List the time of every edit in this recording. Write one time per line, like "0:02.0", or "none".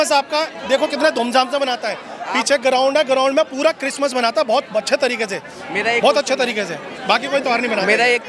none